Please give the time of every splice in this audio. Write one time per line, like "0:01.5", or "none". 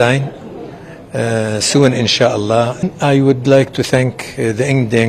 0:02.9